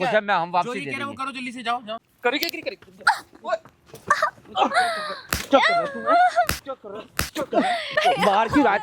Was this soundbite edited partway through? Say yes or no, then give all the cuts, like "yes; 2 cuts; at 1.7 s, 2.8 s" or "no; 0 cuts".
yes; 2 cuts; at 1.9 s, 8.0 s